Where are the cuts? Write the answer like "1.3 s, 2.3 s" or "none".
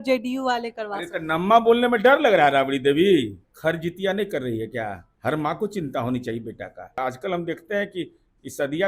3.4 s, 5.1 s, 7.0 s